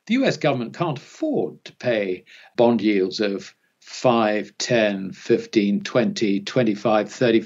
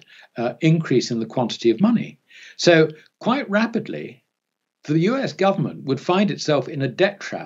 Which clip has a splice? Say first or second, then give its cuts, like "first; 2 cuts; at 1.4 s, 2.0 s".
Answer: first; 1 cut; at 2.4 s